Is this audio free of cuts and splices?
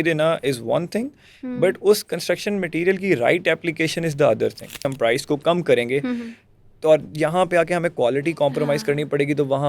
no; 1 cut; at 4.9 s

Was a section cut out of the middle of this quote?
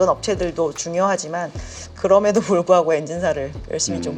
no; 0 cuts

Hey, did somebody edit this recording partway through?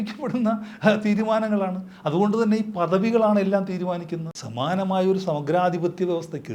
yes; 1 cut; at 4.3 s

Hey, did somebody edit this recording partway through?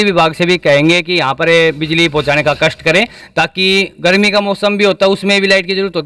no; 0 cuts

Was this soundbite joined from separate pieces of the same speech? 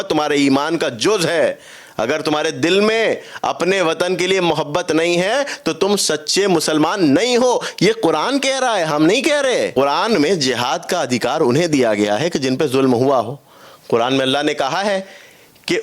yes; 1 cut; at 9.7 s

